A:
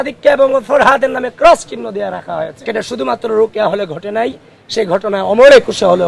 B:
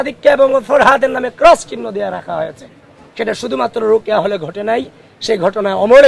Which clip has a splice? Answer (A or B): A